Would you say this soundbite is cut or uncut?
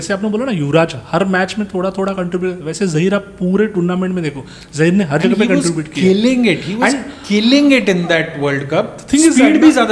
uncut